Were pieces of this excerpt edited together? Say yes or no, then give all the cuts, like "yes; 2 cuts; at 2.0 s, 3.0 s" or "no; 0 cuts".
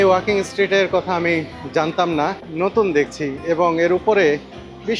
yes; 1 cut; at 2.4 s